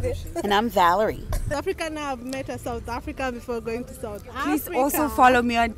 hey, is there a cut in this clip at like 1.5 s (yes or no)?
yes